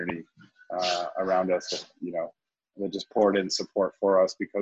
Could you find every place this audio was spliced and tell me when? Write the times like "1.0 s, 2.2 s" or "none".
none